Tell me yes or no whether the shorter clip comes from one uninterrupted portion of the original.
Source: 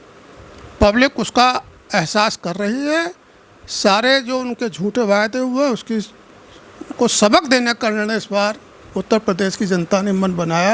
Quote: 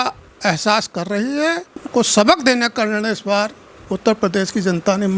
no